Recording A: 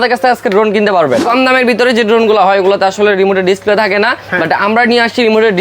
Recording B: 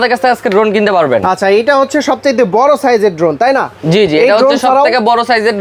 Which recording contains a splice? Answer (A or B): A